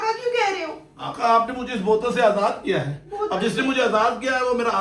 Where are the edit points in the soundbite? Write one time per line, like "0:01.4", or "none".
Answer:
none